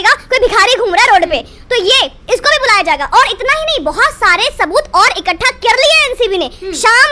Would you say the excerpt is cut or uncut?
uncut